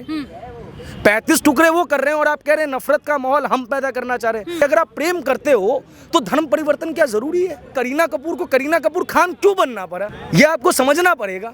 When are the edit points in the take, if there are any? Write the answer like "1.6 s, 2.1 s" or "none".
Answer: 4.5 s, 7.6 s, 10.1 s

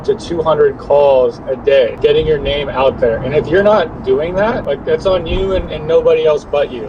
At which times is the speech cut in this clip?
none

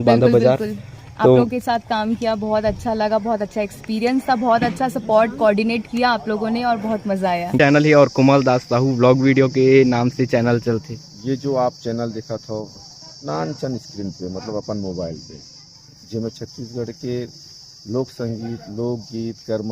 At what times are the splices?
7.5 s

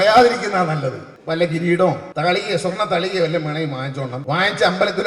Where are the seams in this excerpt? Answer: 1.1 s, 2.1 s, 4.2 s

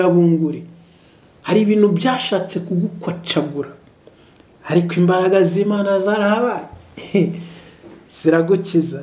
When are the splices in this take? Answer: none

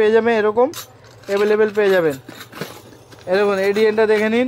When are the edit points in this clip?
none

